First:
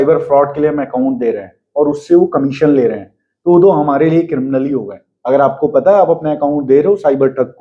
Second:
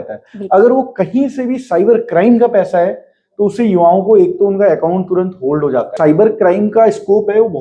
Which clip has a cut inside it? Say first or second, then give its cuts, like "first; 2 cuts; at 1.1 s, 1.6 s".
second; 1 cut; at 5.9 s